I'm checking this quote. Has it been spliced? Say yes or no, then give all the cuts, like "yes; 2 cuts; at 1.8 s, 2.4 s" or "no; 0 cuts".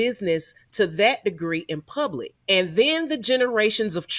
yes; 1 cut; at 2.3 s